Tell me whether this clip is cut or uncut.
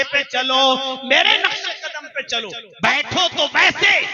cut